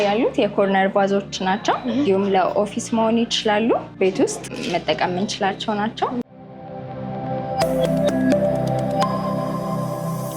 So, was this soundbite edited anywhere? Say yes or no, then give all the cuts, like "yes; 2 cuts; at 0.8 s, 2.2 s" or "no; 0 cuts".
yes; 3 cuts; at 2.1 s, 3.9 s, 6.2 s